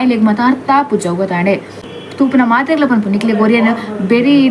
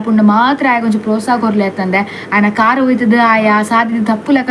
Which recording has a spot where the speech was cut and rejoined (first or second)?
first